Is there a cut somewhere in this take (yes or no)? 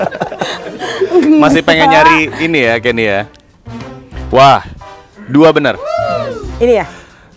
yes